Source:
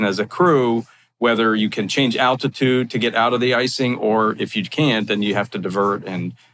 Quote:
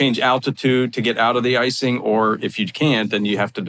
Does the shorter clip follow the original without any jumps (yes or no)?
yes